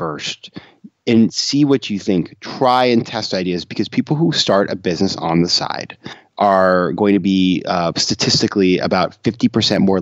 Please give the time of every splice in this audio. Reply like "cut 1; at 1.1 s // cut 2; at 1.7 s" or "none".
cut 1; at 6.2 s